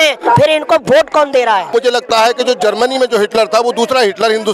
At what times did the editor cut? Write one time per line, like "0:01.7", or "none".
0:01.7